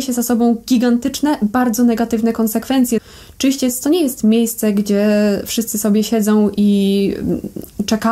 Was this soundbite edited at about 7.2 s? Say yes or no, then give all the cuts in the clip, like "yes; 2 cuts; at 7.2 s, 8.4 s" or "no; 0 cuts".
no; 1 cut; at 3.0 s